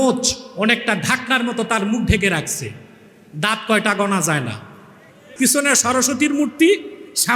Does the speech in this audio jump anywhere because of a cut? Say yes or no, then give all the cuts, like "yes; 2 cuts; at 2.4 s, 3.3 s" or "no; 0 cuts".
yes; 1 cut; at 5.2 s